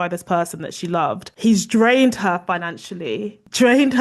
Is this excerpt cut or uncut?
cut